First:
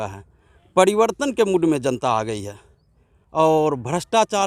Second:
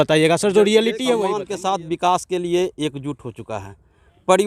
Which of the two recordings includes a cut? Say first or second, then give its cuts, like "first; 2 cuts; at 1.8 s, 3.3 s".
second; 1 cut; at 1.5 s